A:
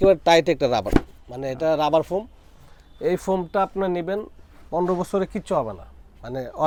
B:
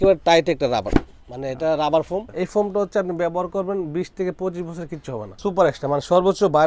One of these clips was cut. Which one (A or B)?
B